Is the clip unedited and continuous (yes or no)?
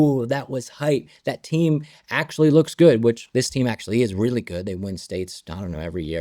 no